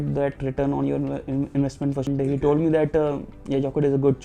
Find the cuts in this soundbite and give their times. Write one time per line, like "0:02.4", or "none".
0:02.1